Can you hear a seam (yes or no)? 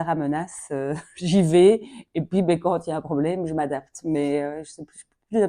no